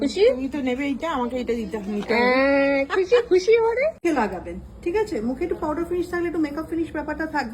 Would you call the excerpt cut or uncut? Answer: cut